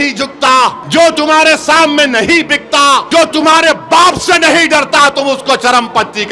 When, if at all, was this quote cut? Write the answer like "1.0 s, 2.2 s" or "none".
0.8 s, 3.1 s